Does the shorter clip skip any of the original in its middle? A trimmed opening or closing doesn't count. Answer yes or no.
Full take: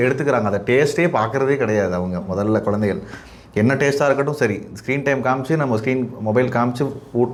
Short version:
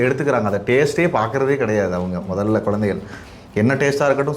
no